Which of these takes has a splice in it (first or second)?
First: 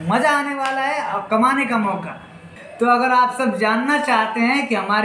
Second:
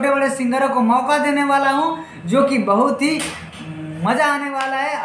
first